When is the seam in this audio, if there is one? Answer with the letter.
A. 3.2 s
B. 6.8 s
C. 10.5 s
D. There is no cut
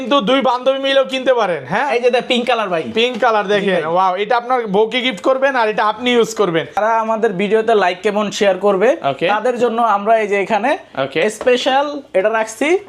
B